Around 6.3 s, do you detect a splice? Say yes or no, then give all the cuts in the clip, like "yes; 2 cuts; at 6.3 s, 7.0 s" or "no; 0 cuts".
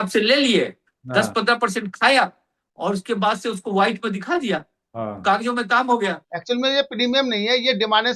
yes; 1 cut; at 6.3 s